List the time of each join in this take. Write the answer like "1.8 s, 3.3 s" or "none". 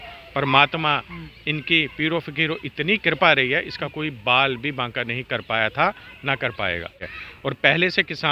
7.1 s

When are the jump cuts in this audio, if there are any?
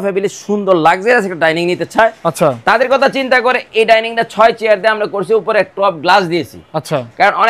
none

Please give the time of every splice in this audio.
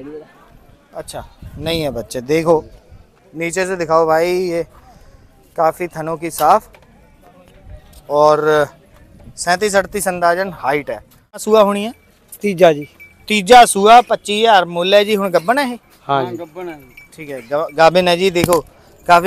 11.4 s

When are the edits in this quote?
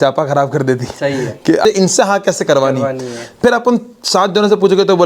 1.6 s

